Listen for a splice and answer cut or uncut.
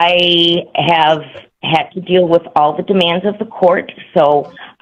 uncut